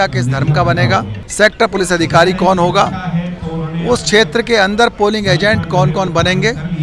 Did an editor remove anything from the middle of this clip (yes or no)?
yes